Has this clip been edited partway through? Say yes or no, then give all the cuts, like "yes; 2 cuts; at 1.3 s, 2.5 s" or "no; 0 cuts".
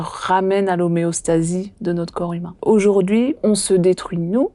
yes; 2 cuts; at 2.5 s, 3.4 s